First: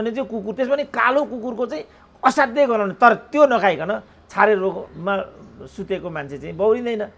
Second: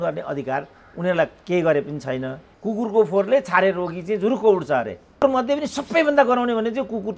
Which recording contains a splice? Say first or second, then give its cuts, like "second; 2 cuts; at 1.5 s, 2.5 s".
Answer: second; 2 cuts; at 2.4 s, 5.2 s